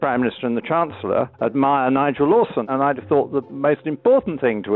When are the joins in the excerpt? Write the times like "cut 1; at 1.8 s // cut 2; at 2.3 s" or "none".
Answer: cut 1; at 1.3 s // cut 2; at 2.6 s